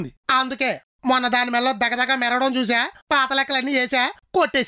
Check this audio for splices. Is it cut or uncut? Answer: uncut